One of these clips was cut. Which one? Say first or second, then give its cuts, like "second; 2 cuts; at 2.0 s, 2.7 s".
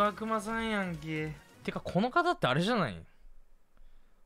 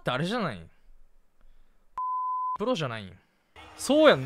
first; 1 cut; at 1.5 s